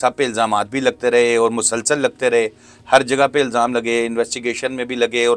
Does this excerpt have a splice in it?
no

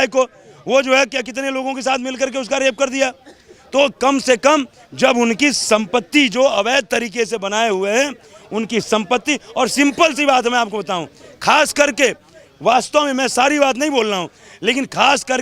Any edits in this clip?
no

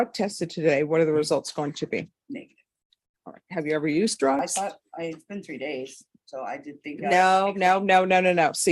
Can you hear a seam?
yes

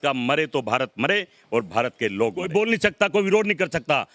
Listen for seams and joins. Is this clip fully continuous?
no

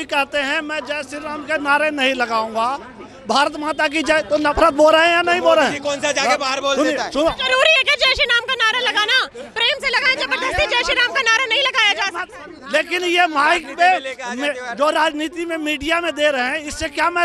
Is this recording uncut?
yes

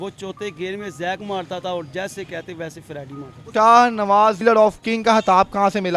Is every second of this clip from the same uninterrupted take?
no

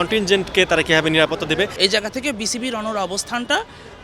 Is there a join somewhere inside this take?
yes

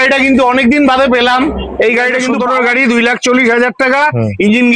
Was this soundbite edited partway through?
yes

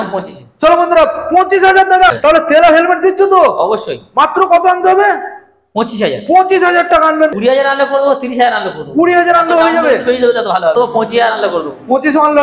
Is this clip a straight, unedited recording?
no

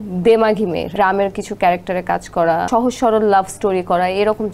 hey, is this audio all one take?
no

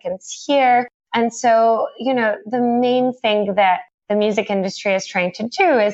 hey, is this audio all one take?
yes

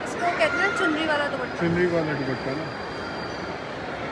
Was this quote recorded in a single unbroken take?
yes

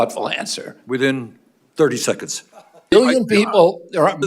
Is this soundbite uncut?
no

